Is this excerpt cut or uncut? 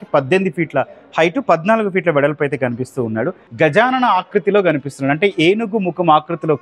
cut